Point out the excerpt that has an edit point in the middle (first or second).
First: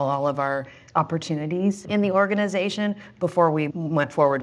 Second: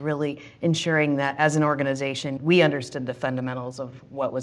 first